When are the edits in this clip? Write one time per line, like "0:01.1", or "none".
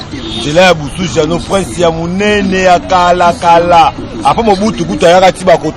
none